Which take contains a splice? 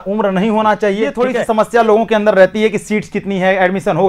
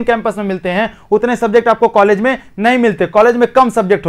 first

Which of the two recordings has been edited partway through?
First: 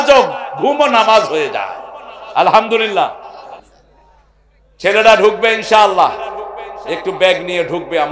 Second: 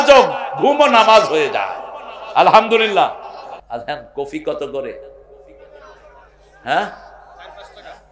second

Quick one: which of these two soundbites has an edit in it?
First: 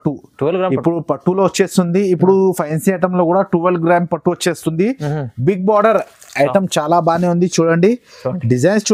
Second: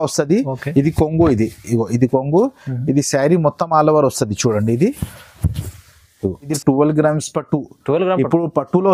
second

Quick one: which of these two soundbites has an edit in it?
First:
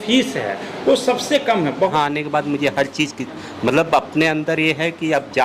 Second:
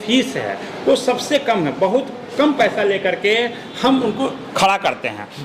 first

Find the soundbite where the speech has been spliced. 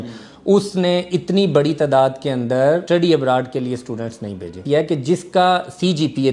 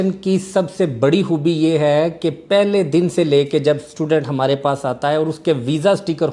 first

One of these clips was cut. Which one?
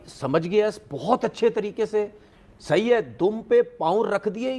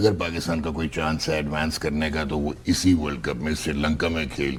first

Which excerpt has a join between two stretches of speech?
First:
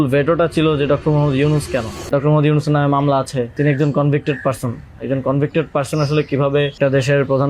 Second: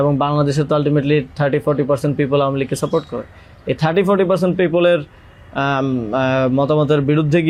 first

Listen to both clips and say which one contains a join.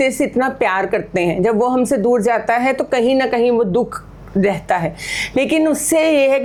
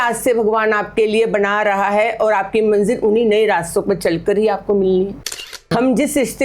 second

